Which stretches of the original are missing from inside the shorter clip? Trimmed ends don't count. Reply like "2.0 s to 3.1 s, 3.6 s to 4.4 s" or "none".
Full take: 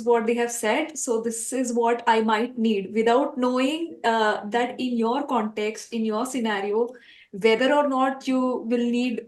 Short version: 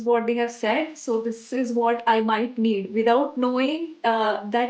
none